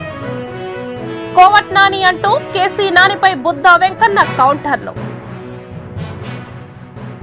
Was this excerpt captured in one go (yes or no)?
yes